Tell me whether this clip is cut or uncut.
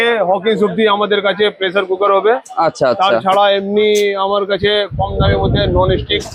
uncut